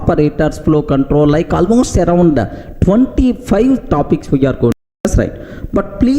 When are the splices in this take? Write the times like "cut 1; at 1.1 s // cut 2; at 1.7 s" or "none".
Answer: cut 1; at 4.8 s